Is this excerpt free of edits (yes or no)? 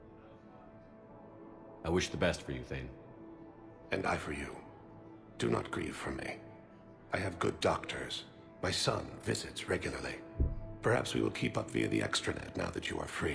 no